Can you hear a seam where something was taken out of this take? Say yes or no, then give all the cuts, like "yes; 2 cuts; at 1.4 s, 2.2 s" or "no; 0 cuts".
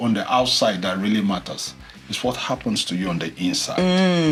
no; 0 cuts